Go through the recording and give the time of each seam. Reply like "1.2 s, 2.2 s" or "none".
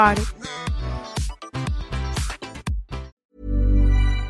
3.1 s